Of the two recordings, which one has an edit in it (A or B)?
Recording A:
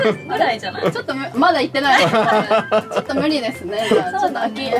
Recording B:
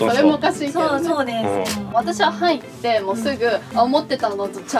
B